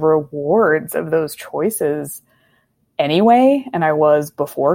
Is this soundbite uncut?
yes; 0 cuts

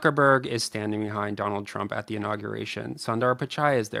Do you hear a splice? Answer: no; 0 cuts

